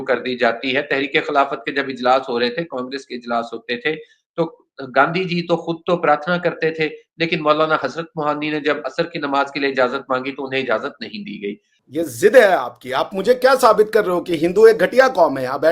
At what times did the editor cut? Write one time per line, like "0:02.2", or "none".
0:11.7